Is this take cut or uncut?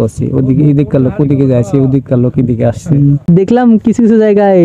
cut